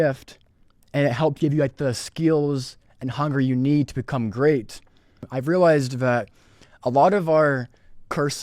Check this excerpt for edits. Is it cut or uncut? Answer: cut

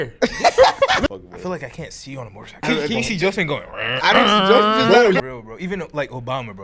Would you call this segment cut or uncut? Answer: cut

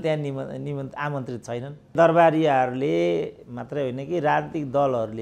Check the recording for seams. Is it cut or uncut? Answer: cut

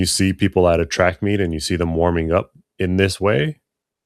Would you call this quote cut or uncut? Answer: uncut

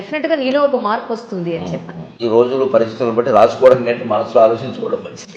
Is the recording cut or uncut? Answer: cut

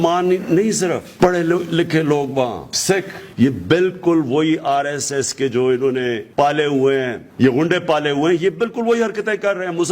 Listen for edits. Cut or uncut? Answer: cut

